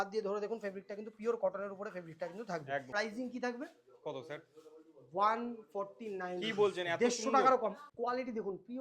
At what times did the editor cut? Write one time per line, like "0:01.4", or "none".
0:02.9
0:07.8

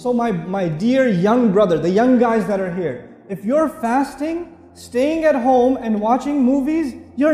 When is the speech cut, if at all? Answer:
none

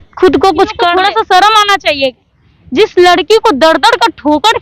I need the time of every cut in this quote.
0:00.9

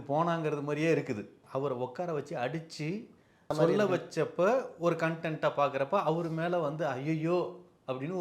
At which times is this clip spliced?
0:01.4
0:03.5

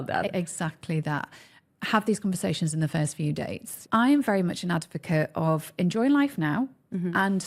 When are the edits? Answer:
0:03.8

